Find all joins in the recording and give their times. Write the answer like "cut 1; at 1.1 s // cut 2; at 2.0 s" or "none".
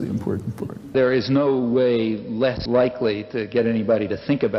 cut 1; at 0.9 s // cut 2; at 2.6 s